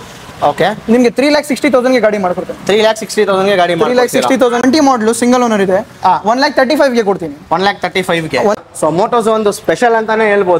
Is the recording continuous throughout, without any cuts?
no; 2 cuts; at 4.6 s, 8.5 s

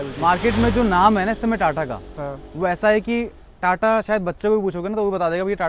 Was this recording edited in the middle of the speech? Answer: no; 0 cuts

